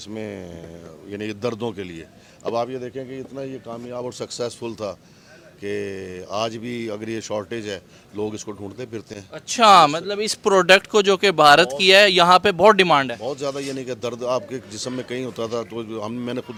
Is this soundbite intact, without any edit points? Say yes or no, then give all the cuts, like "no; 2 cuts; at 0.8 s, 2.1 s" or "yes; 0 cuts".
yes; 0 cuts